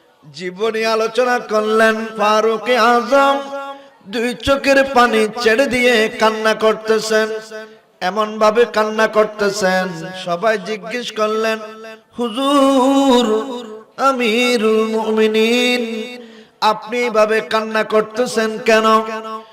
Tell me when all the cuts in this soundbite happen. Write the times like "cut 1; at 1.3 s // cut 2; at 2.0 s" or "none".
cut 1; at 2.1 s // cut 2; at 10.1 s